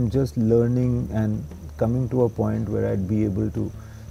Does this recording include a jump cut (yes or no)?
no